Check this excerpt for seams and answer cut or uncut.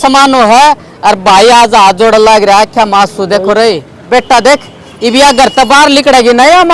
cut